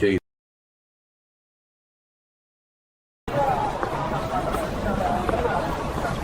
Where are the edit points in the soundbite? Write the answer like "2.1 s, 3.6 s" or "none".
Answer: none